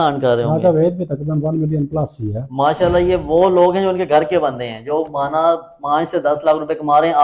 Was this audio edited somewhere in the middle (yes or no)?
no